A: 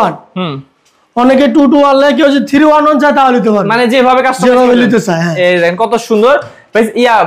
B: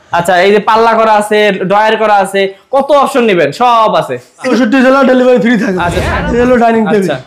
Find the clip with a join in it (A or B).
B